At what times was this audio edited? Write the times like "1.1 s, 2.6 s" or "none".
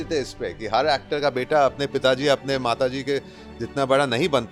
none